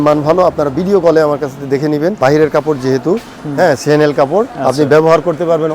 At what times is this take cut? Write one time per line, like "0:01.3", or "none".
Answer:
0:02.2
0:04.5